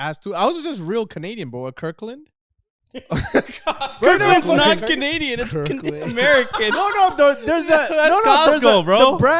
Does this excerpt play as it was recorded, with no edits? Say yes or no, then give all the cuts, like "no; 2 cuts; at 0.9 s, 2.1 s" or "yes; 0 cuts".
yes; 0 cuts